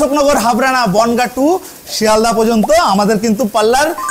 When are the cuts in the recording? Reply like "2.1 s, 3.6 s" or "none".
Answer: none